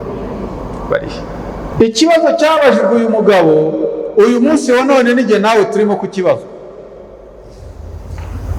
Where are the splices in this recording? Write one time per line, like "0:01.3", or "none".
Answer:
0:01.7